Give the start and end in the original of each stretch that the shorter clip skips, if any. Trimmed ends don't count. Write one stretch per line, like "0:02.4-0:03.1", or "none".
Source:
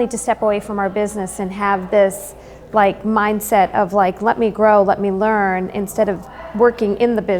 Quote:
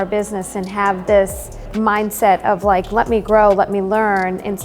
0:02.5-0:03.0

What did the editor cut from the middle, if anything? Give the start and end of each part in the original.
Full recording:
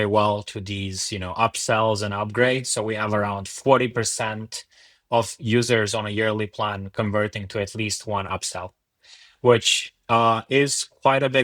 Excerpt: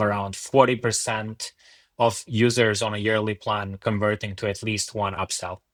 none

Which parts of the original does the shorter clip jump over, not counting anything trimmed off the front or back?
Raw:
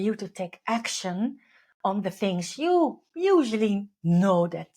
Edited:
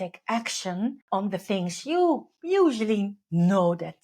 0:01.4-0:01.7

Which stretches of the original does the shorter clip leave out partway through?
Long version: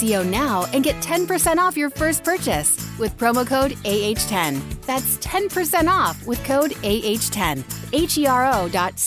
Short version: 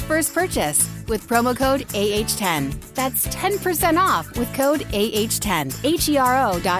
0:07.6-0:07.8

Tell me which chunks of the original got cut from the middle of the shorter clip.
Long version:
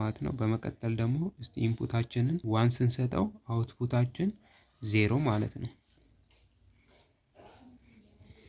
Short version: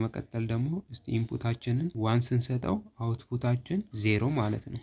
0:04.4-0:04.8

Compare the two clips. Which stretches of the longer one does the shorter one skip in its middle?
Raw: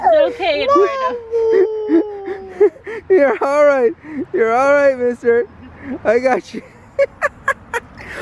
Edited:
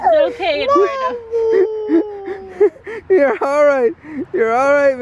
none

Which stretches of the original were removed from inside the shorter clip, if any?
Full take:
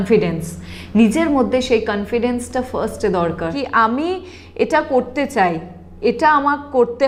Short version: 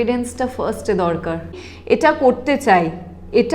0:03.7-0:04.2

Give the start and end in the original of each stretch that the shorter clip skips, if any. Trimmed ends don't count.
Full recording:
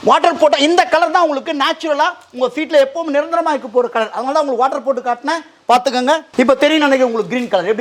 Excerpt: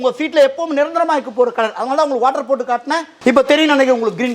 0:05.5-0:06.3

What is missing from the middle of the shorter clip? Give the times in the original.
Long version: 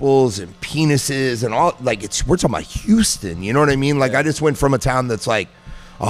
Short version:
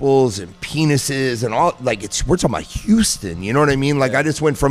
none

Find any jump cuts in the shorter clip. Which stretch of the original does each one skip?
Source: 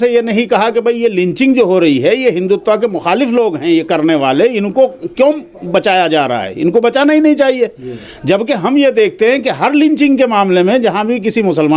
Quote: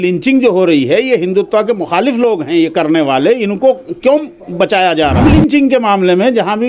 0:06.3-0:09.7

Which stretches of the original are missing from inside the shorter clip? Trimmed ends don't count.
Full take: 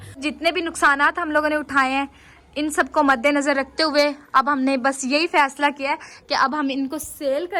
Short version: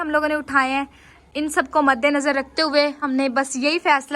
0:04.2-0:04.5

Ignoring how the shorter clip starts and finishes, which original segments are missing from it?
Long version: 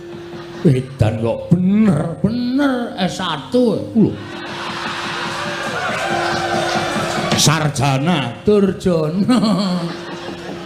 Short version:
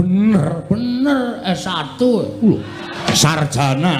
0:04.6-0:07.3

